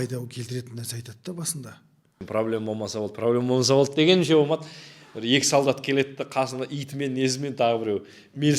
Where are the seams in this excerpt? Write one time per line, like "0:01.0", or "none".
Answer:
0:02.2